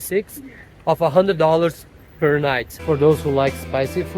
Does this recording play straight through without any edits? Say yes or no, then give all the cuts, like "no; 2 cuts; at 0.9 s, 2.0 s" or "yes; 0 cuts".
no; 1 cut; at 2.7 s